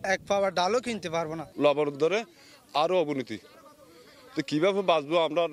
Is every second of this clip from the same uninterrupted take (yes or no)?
yes